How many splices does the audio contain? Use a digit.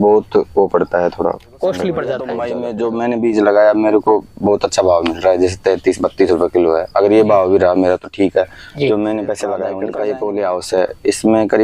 2